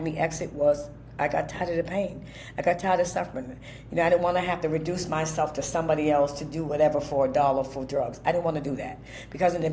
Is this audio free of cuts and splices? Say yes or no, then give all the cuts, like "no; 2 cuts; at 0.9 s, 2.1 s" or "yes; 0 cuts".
yes; 0 cuts